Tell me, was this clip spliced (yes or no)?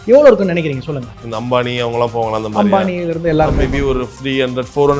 yes